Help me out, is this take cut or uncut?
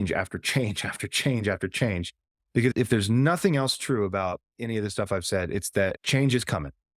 cut